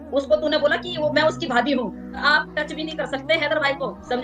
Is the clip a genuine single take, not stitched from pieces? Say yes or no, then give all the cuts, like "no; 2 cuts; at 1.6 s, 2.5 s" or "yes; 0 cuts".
no; 1 cut; at 2.2 s